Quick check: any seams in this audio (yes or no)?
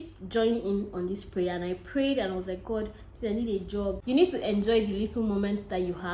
yes